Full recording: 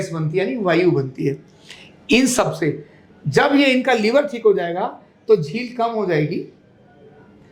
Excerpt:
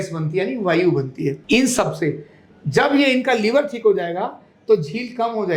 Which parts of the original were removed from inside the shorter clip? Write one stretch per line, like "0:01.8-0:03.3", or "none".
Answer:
0:01.4-0:02.0